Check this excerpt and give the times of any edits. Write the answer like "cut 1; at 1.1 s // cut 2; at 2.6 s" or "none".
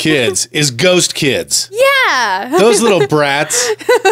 none